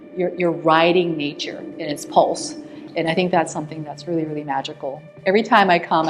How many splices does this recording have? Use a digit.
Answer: 1